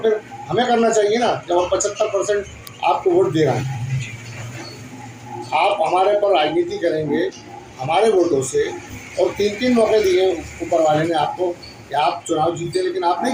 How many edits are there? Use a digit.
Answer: 0